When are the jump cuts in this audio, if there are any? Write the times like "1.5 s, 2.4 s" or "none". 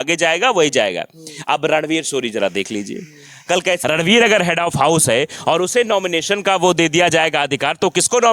3.8 s